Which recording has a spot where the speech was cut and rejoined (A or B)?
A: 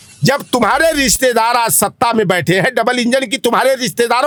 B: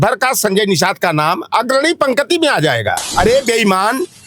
B